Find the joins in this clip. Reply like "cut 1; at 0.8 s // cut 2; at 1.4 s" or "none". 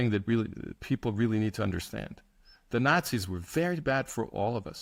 none